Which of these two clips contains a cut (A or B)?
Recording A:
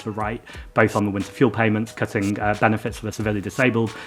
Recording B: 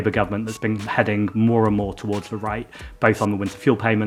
A